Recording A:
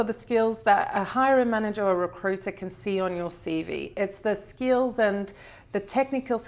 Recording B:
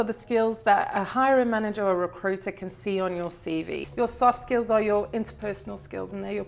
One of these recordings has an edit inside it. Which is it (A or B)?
B